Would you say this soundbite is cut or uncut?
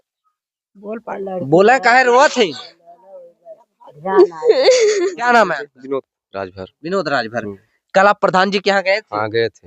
cut